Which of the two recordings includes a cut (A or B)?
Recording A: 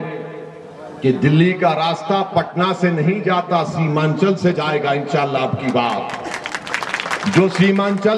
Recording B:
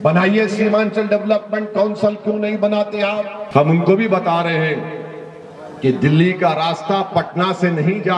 B